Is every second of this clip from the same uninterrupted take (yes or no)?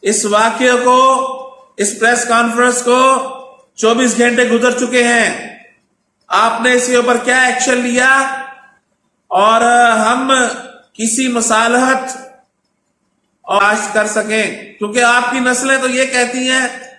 no